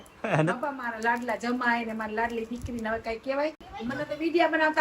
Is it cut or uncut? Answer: cut